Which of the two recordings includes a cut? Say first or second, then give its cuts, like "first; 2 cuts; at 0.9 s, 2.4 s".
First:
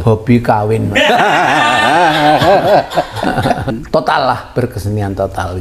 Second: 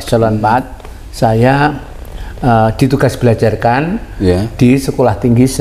first; 1 cut; at 3.8 s